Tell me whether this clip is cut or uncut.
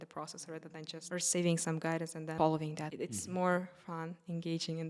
cut